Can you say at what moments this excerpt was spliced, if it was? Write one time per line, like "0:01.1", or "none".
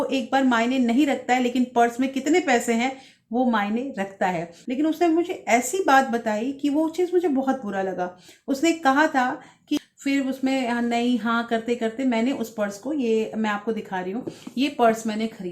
0:04.5
0:09.8